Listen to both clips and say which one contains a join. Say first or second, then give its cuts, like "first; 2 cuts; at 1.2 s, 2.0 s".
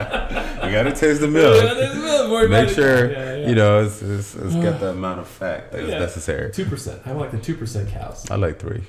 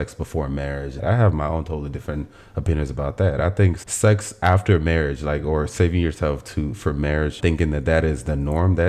second; 3 cuts; at 1.0 s, 3.8 s, 7.4 s